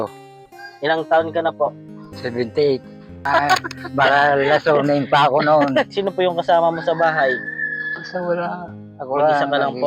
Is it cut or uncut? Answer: cut